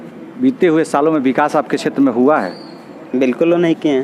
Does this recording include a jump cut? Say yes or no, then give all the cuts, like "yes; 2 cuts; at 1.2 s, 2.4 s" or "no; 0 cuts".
no; 0 cuts